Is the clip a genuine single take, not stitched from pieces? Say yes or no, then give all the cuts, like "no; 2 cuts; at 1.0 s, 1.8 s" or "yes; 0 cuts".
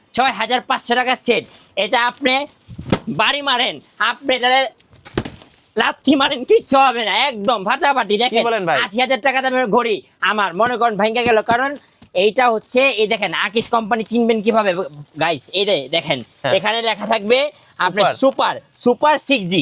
yes; 0 cuts